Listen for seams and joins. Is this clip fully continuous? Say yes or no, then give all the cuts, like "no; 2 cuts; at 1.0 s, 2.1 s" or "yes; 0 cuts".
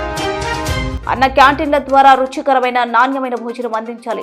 no; 1 cut; at 0.9 s